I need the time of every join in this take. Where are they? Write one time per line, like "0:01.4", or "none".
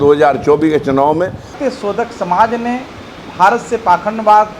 0:01.6